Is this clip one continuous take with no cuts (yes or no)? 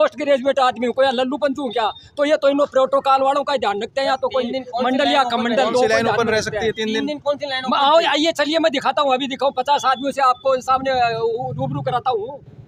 yes